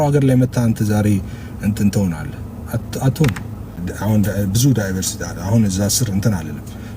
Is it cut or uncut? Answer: cut